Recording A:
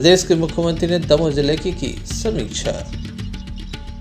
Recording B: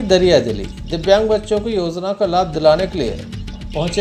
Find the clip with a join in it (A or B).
A